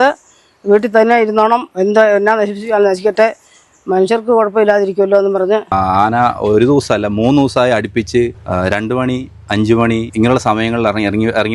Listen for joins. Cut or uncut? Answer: cut